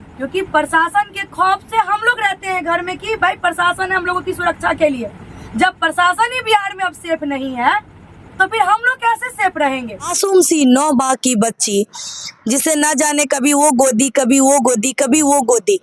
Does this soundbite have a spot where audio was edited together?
yes; 1 cut; at 10.1 s

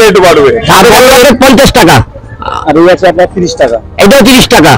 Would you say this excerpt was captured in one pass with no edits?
no; 1 cut; at 1.0 s

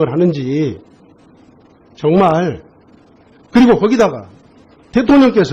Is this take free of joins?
yes; 0 cuts

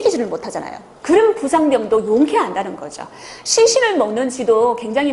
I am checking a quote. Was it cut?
no; 0 cuts

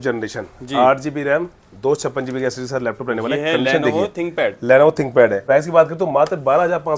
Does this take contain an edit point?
yes; 1 cut; at 5.4 s

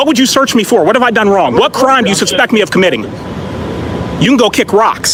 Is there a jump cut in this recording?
no; 0 cuts

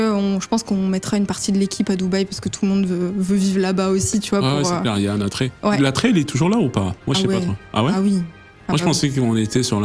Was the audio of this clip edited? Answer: no; 0 cuts

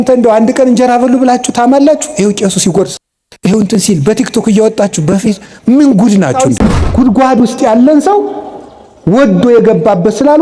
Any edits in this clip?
yes; 1 cut; at 6.7 s

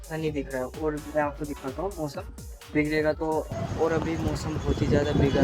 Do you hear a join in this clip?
yes; 1 cut; at 3.5 s

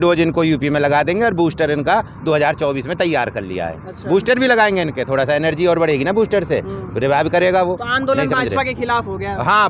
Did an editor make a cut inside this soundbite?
no; 0 cuts

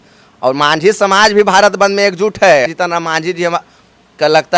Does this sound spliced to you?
yes; 1 cut; at 2.7 s

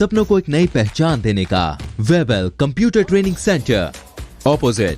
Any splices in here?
yes; 1 cut; at 1.8 s

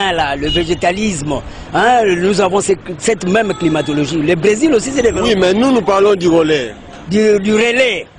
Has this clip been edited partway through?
yes; 1 cut; at 4.0 s

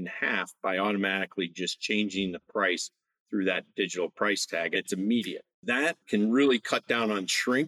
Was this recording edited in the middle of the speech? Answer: yes; 2 cuts; at 4.8 s, 6.0 s

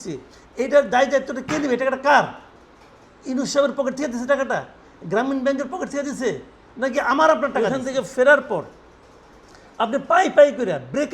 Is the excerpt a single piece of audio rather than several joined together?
no; 1 cut; at 7.5 s

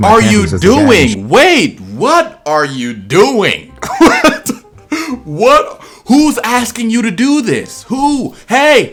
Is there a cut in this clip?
no; 0 cuts

